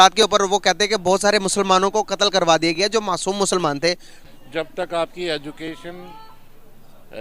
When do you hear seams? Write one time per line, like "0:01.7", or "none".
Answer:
0:04.1